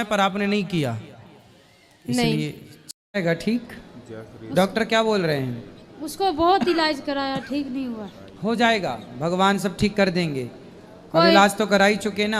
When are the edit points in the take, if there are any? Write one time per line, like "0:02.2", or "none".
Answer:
0:03.0